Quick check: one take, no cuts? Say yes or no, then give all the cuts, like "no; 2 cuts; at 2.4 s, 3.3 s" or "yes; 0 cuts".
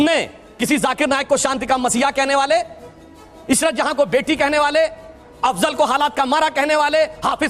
yes; 0 cuts